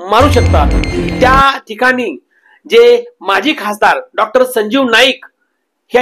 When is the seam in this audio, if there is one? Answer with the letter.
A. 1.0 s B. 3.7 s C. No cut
A